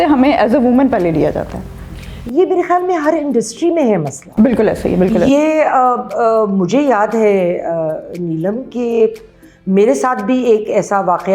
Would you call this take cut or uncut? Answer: uncut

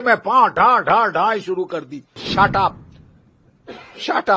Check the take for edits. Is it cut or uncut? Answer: cut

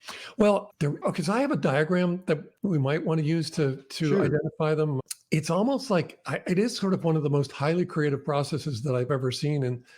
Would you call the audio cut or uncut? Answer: uncut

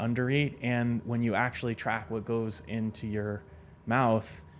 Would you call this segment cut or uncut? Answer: uncut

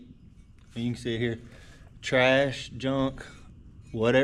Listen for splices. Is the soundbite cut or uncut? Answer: uncut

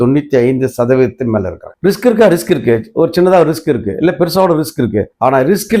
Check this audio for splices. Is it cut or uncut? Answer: cut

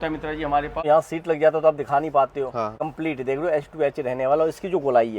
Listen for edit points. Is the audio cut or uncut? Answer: cut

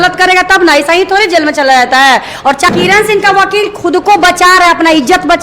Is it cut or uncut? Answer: uncut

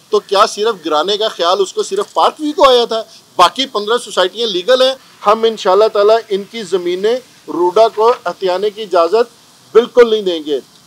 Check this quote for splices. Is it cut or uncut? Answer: cut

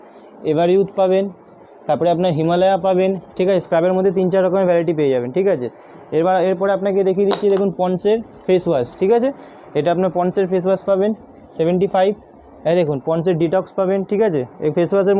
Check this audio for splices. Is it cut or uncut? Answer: uncut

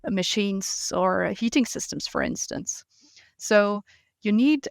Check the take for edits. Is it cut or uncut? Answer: uncut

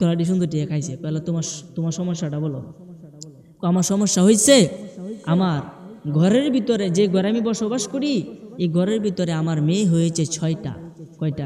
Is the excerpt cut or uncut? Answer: uncut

